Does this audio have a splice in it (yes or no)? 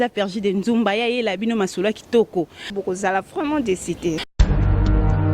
yes